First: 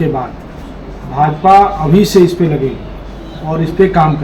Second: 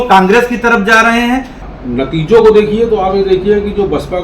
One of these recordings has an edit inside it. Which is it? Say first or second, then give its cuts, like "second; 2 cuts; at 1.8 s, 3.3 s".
second; 1 cut; at 1.6 s